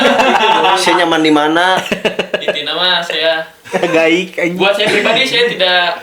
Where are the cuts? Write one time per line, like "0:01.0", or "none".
none